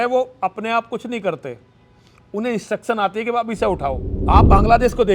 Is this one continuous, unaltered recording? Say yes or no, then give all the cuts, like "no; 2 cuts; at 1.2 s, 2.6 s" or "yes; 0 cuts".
no; 1 cut; at 4.1 s